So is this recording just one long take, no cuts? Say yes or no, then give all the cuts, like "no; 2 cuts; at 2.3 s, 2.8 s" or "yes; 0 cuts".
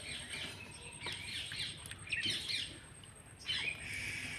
yes; 0 cuts